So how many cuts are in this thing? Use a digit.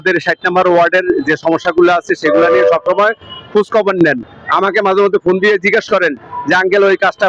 0